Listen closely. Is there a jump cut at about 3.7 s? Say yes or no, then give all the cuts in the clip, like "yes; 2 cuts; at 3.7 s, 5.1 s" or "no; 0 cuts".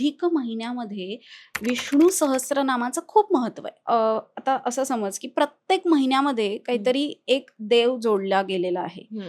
yes; 1 cut; at 3.7 s